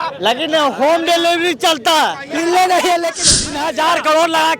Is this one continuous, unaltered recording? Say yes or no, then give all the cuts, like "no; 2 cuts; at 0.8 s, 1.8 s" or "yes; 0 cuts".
no; 1 cut; at 3.2 s